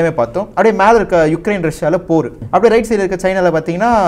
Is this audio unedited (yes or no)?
no